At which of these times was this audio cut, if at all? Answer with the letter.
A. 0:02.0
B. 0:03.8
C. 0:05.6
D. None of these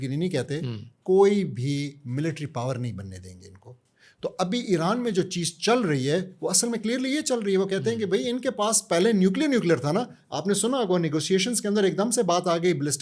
D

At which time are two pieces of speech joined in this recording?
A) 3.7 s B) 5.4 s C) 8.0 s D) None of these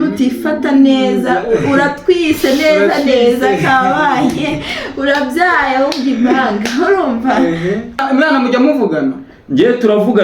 C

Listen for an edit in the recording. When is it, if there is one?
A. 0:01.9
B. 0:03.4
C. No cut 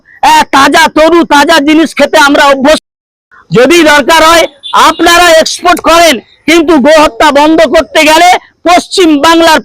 C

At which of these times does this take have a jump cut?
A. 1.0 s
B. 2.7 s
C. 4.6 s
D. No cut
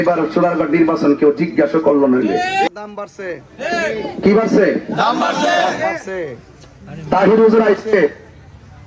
B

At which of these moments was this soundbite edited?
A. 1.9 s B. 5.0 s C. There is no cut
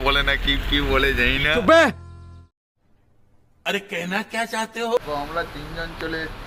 B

